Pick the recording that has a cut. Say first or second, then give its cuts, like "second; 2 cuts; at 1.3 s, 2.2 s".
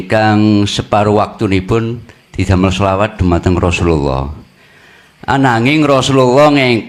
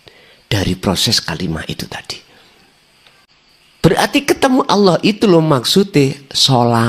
second; 1 cut; at 3.2 s